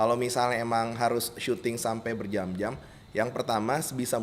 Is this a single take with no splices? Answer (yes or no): yes